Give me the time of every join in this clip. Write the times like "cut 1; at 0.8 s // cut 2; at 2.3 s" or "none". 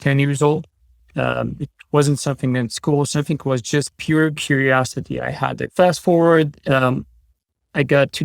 cut 1; at 5.6 s